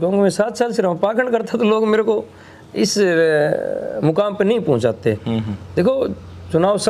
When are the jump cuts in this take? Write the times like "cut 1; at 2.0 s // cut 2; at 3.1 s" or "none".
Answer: none